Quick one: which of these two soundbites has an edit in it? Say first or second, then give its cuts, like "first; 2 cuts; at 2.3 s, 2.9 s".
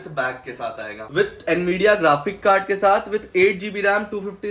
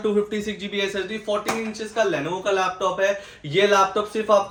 first; 1 cut; at 1.0 s